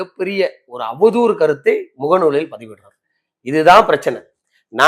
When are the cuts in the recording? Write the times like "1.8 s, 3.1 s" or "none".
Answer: none